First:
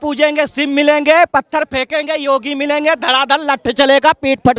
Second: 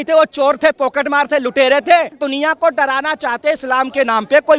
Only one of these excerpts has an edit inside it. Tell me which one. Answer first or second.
second